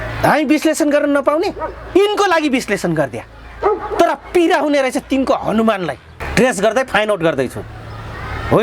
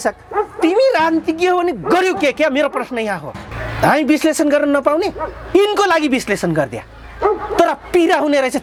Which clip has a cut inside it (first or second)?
first